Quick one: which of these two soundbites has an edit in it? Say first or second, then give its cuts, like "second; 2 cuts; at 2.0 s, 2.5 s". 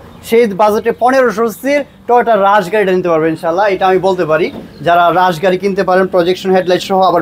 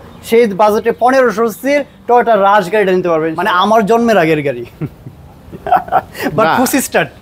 second; 1 cut; at 3.3 s